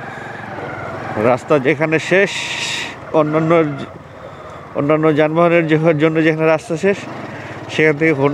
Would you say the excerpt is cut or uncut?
uncut